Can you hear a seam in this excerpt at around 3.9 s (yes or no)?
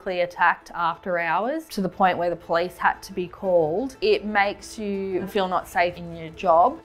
yes